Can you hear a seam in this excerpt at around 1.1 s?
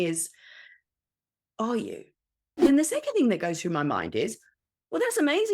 no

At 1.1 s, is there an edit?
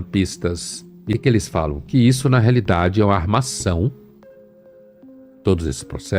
yes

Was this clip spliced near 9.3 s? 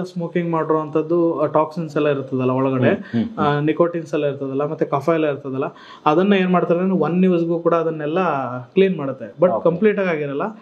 no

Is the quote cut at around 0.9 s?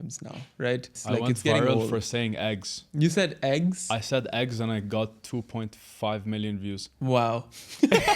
yes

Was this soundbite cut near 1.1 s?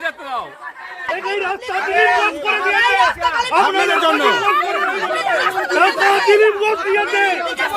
yes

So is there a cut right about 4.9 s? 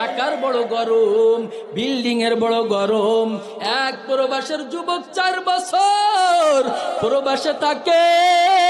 no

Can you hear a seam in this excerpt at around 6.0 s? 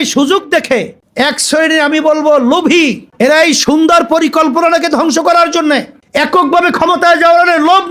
yes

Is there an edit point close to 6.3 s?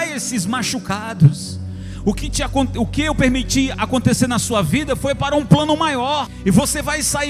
yes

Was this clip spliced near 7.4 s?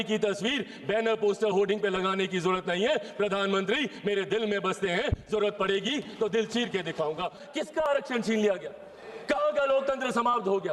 yes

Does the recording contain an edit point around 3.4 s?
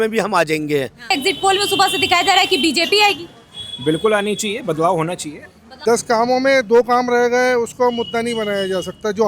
no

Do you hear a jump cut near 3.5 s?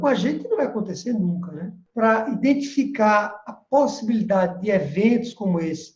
no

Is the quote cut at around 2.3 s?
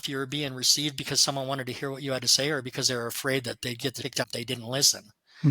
no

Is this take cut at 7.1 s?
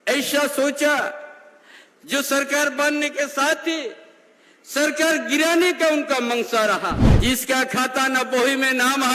yes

